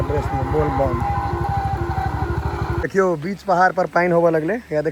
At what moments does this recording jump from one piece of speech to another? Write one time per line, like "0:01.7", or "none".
0:02.8